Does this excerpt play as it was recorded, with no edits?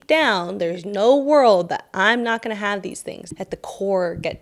no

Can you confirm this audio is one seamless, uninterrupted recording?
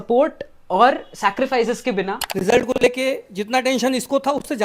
no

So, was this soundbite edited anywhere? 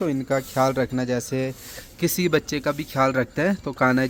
no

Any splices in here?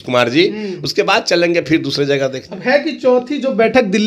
no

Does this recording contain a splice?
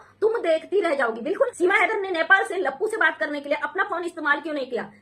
yes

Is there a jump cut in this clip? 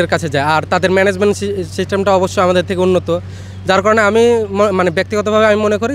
no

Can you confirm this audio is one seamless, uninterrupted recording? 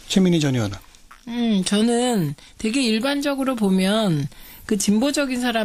no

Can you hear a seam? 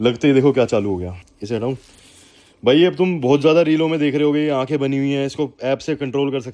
yes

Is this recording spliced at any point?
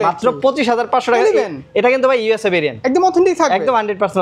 no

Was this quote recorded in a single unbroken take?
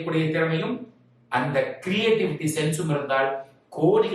yes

